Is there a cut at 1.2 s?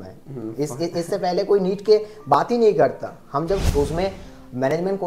no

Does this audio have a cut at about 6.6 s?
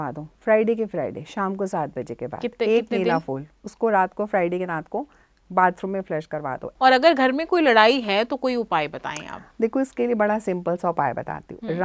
yes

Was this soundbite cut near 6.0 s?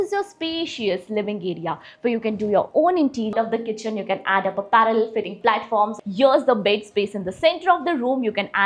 yes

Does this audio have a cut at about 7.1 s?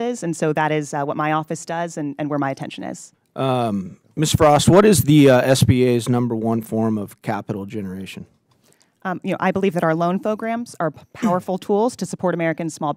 no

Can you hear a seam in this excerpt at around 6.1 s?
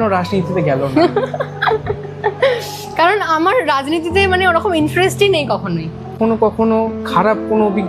yes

